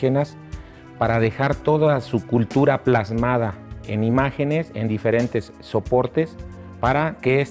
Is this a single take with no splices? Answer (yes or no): no